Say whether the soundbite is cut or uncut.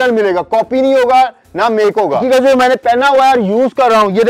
cut